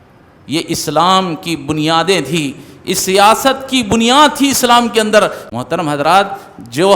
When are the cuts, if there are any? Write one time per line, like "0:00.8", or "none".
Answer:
0:05.4